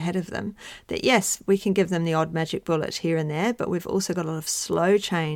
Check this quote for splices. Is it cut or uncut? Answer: uncut